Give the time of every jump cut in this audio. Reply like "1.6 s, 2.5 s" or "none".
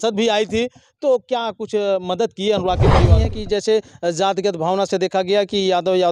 3.1 s